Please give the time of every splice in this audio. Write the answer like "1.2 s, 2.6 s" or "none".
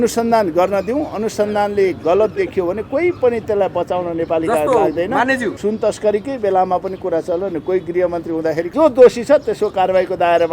5.5 s, 8.7 s